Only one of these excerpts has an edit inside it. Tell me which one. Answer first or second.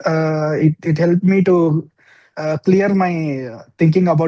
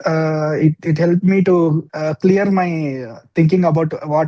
second